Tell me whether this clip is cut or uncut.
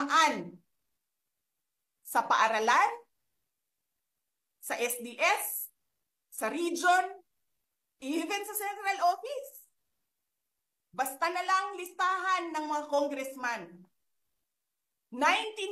uncut